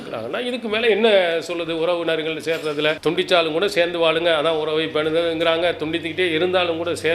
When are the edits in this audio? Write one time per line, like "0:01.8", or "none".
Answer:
0:03.0